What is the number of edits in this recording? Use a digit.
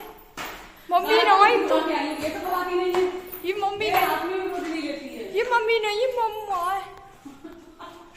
0